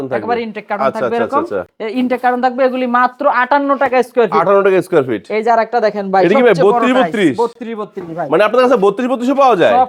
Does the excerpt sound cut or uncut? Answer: uncut